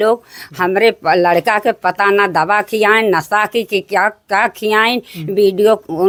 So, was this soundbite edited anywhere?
no; 0 cuts

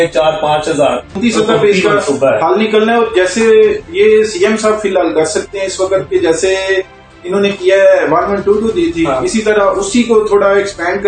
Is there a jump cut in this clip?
yes; 1 cut; at 1.2 s

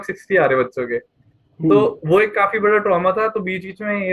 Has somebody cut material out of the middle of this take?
no; 0 cuts

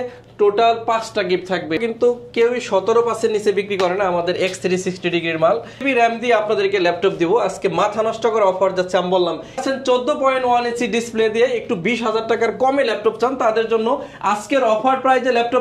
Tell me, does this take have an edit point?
yes; 3 cuts; at 1.8 s, 5.8 s, 9.6 s

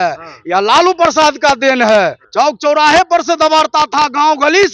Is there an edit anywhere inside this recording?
yes; 1 cut; at 2.2 s

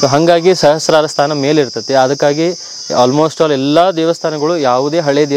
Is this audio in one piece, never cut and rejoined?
yes; 0 cuts

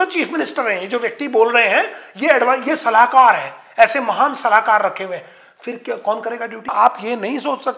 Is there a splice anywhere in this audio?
yes; 1 cut; at 6.7 s

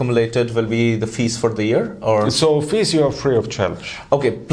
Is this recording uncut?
yes; 0 cuts

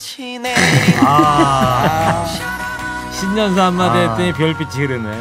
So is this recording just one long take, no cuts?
yes; 0 cuts

